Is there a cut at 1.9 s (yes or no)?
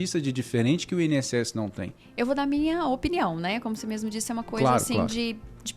no